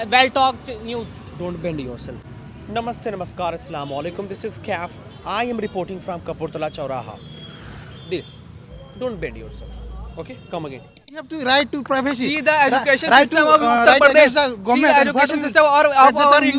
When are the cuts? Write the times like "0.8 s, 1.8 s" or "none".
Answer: 2.2 s, 11.3 s